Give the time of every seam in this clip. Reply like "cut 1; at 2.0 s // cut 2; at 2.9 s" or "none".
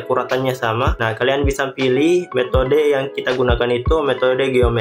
none